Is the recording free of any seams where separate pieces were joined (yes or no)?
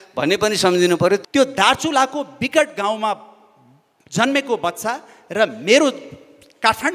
no